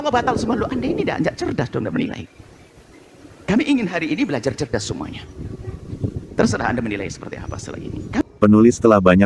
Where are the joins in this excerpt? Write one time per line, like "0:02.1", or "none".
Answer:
0:08.2